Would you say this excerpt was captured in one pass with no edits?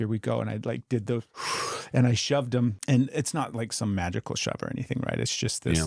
no; 1 cut; at 2.8 s

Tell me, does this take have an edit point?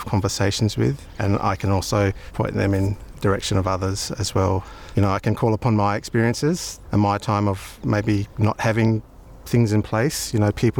yes; 5 cuts; at 1.1 s, 2.2 s, 4.7 s, 6.7 s, 8.0 s

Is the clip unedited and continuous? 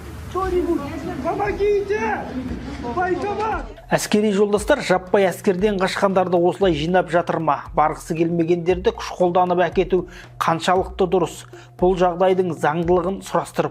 yes; 0 cuts

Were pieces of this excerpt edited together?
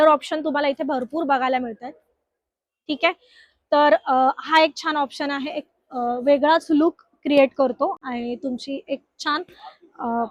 no; 0 cuts

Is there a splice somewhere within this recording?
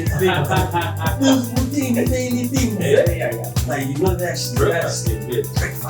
no; 0 cuts

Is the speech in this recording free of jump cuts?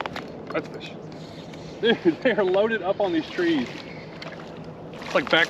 yes; 0 cuts

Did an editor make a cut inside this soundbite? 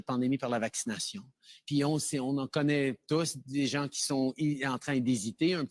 yes; 1 cut; at 1.1 s

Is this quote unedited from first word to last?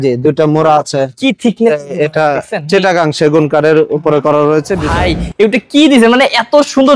no; 1 cut; at 4.8 s

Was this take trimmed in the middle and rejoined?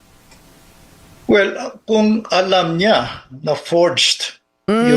yes; 1 cut; at 3.7 s

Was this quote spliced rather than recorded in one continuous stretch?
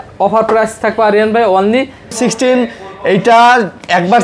yes; 1 cut; at 2.2 s

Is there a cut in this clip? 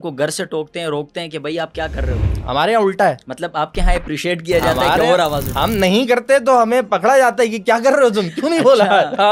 no; 0 cuts

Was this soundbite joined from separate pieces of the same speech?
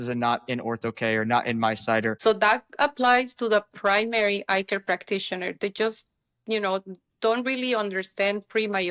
yes; 1 cut; at 2.2 s

